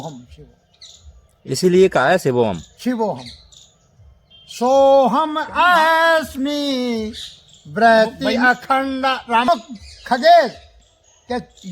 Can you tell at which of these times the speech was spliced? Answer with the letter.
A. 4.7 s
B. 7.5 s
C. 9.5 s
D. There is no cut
C